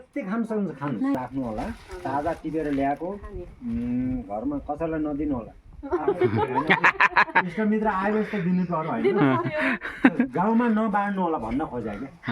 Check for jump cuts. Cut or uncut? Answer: cut